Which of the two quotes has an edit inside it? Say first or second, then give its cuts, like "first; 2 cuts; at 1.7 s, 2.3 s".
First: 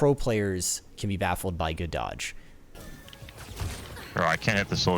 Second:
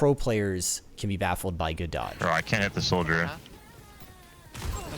second; 1 cut; at 2.1 s